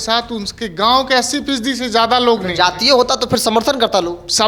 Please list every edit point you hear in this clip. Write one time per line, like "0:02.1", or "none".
none